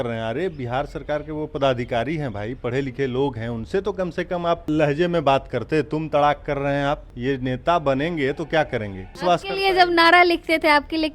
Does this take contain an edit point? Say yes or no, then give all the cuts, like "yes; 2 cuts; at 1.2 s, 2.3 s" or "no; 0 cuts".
yes; 3 cuts; at 4.7 s, 7.1 s, 9.2 s